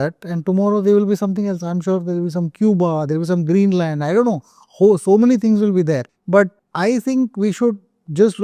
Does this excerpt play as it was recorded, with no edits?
yes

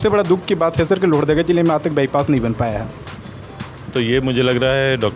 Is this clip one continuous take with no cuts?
yes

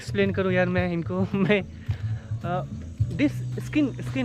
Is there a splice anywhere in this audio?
no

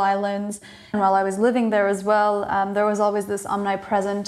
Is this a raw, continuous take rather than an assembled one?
no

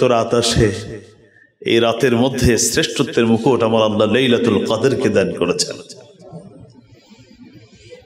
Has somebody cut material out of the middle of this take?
no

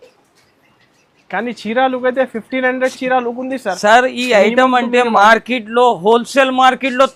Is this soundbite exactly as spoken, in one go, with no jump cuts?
yes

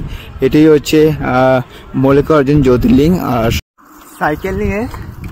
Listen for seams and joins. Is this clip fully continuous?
no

